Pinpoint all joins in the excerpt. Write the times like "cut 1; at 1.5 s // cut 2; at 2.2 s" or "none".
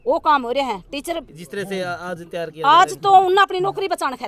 cut 1; at 1.3 s